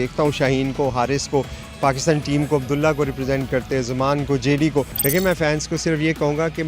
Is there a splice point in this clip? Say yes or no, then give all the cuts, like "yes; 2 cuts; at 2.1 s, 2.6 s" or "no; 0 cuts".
yes; 1 cut; at 5.0 s